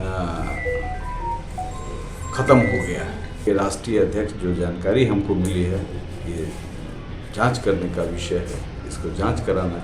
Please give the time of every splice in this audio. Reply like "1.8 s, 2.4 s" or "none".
3.3 s